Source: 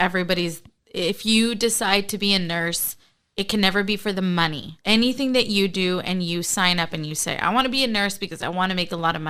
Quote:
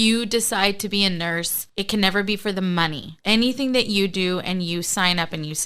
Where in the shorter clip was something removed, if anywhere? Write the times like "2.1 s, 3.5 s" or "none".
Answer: 1.6 s